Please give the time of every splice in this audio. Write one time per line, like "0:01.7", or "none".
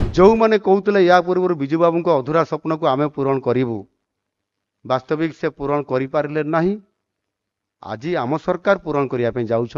none